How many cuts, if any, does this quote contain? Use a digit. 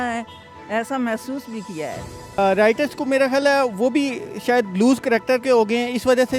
1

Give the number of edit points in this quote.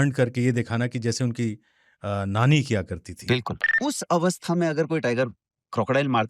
1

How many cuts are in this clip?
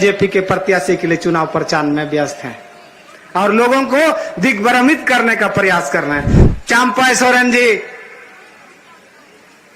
1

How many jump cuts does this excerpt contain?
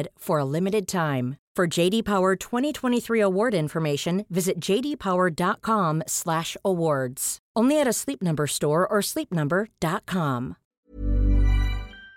1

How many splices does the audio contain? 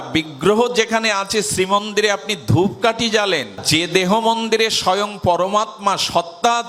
0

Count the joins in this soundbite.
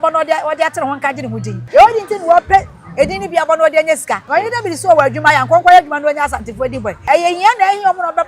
3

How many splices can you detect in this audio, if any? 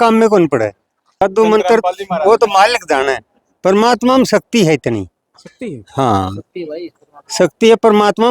1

